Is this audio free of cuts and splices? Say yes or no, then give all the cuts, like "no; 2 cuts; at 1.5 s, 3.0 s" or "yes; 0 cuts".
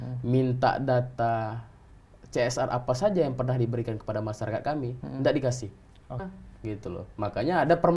no; 1 cut; at 6.2 s